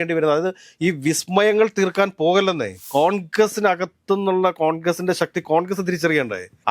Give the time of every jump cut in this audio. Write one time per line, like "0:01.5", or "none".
0:02.8